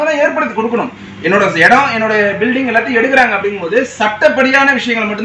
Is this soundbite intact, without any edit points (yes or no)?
yes